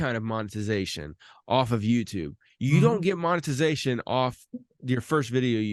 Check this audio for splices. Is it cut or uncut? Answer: uncut